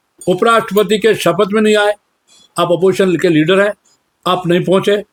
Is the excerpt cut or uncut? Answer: uncut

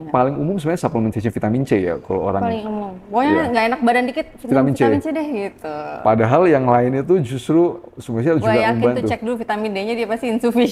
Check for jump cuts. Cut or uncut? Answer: uncut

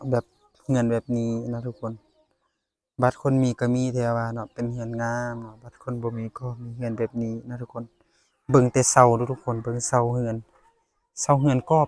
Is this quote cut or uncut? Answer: uncut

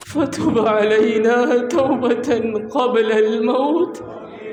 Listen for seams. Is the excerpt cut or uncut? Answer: uncut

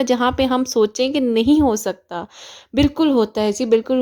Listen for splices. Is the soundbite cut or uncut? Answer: uncut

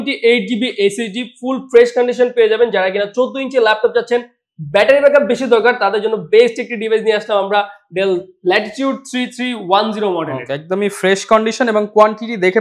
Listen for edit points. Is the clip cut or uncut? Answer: uncut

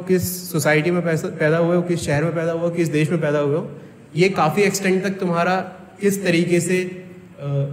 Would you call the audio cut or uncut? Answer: uncut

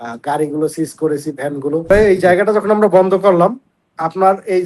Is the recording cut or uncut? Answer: cut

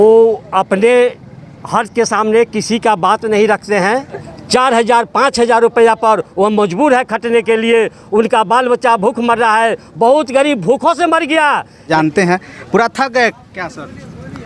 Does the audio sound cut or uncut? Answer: cut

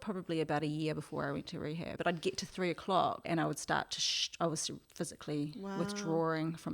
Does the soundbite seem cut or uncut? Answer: cut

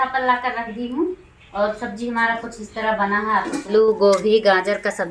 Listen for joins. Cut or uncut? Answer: cut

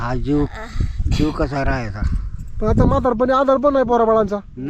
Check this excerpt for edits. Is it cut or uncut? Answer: uncut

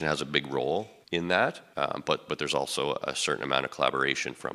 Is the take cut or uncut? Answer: cut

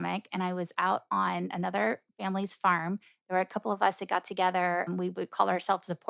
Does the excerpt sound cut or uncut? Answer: cut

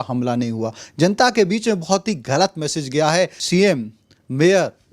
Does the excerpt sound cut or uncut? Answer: cut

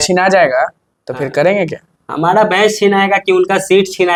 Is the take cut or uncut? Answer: uncut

